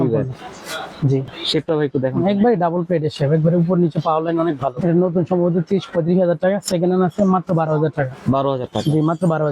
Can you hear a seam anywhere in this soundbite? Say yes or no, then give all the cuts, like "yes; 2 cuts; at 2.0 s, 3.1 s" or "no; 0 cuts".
yes; 2 cuts; at 1.3 s, 4.8 s